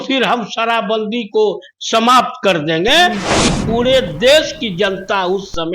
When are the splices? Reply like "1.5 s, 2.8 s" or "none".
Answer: 3.4 s